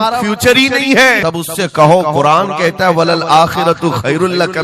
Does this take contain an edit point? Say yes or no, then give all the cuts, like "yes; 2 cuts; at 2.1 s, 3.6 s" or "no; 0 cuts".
yes; 1 cut; at 1.2 s